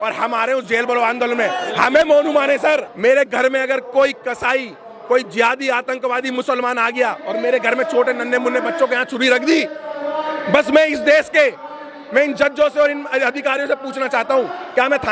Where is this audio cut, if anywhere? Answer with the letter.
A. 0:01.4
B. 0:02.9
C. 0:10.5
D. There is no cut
B